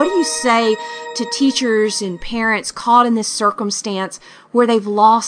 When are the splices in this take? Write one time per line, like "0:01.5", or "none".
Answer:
none